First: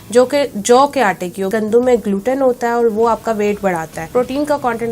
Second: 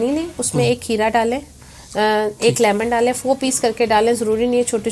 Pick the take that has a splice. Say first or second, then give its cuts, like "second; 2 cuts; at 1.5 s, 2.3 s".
first; 2 cuts; at 1.5 s, 4.0 s